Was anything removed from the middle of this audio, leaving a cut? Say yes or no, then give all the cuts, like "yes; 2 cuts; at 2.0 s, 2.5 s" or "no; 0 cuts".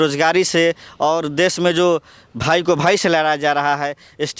no; 0 cuts